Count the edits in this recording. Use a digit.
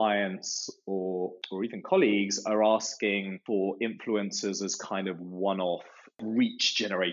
1